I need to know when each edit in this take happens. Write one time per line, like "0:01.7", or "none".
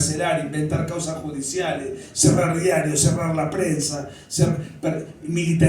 none